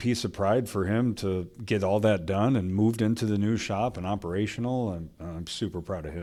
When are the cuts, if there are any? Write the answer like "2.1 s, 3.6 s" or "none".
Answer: none